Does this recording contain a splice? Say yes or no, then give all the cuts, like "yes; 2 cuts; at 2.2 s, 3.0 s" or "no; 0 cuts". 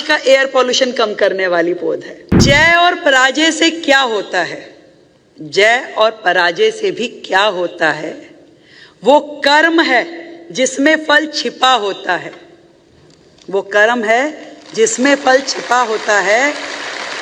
yes; 1 cut; at 2.4 s